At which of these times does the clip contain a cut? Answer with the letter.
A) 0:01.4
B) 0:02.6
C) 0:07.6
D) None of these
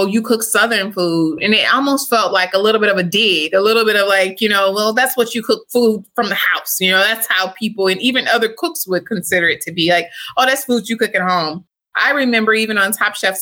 A